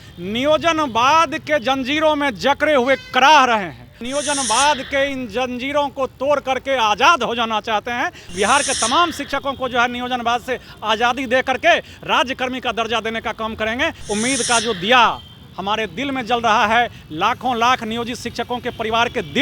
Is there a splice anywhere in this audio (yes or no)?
yes